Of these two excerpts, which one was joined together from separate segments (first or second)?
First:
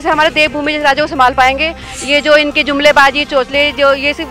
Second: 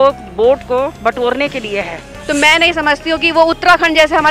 second